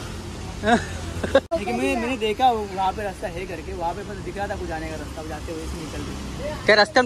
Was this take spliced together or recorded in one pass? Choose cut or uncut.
cut